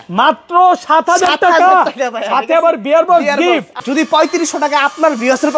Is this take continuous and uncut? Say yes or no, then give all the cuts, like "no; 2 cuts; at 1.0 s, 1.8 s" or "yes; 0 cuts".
no; 1 cut; at 3.8 s